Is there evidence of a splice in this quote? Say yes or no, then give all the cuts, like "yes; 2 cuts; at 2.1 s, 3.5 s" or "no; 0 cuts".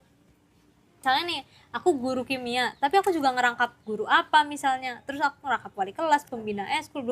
yes; 1 cut; at 1.0 s